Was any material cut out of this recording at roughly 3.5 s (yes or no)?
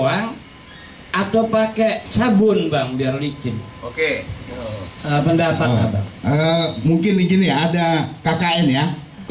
no